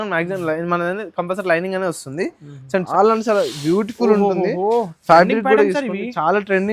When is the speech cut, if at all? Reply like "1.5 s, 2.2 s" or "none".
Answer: 2.9 s